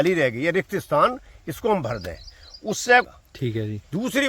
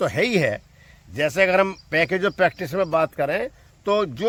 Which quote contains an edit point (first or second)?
first